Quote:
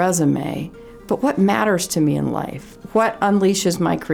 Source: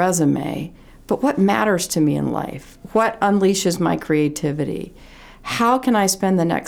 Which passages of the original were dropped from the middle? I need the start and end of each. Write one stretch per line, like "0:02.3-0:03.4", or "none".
none